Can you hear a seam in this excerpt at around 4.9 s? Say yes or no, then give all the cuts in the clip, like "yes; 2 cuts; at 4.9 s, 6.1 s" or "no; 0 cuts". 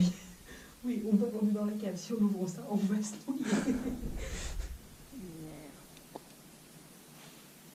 no; 0 cuts